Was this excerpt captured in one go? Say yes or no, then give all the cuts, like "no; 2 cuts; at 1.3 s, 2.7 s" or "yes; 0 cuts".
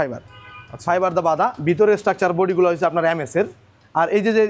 yes; 0 cuts